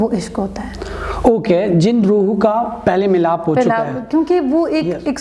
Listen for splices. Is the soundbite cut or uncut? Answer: uncut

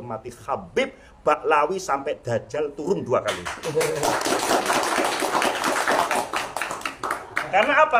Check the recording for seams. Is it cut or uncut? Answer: uncut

